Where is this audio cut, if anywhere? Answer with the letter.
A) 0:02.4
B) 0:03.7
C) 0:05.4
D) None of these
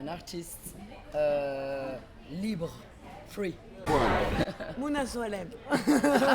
B